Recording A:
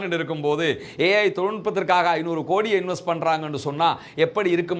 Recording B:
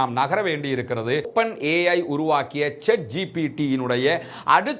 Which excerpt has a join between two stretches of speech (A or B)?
B